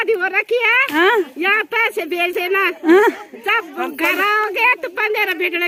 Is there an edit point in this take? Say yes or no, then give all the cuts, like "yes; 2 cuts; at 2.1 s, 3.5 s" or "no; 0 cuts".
no; 0 cuts